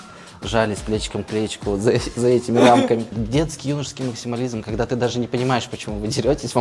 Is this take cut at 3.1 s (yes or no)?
yes